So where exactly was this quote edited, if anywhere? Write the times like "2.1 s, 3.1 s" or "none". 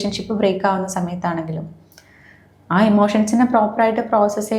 none